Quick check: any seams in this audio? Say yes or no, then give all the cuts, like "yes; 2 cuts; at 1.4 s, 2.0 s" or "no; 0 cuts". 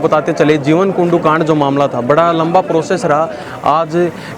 yes; 1 cut; at 3.5 s